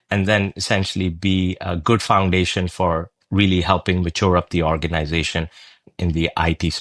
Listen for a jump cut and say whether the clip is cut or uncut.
cut